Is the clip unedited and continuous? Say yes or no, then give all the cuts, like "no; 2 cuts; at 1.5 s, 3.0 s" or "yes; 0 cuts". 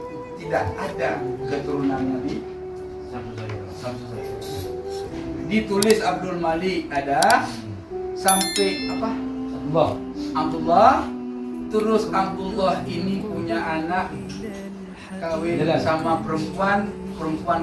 yes; 0 cuts